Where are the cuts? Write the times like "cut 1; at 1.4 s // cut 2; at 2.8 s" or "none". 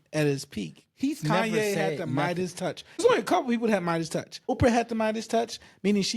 cut 1; at 3.0 s // cut 2; at 4.5 s